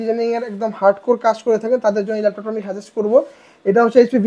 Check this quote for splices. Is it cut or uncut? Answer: uncut